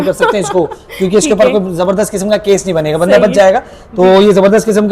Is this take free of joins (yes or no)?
yes